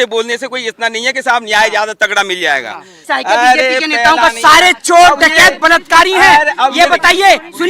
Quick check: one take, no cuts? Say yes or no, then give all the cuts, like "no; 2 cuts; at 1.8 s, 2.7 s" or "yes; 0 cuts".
no; 2 cuts; at 2.9 s, 4.2 s